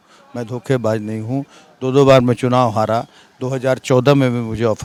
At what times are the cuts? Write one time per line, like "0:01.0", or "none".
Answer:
none